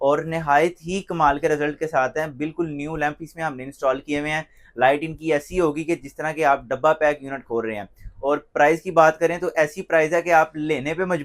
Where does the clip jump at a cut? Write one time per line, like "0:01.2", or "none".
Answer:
none